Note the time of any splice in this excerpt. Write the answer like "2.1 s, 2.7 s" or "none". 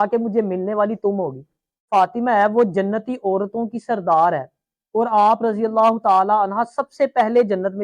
1.9 s